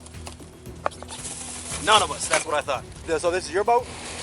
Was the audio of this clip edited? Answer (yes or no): yes